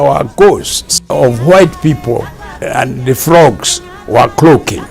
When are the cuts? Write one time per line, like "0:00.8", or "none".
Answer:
0:01.1
0:02.6